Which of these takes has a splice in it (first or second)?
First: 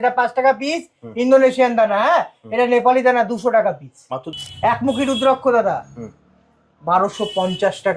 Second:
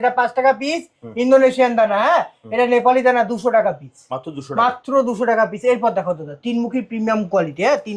first